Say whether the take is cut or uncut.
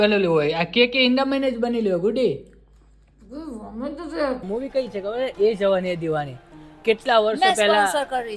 cut